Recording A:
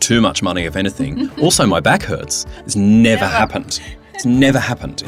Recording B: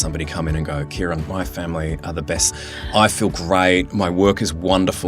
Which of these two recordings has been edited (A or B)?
B